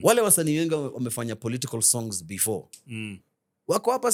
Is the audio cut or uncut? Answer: uncut